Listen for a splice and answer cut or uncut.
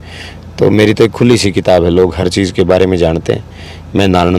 uncut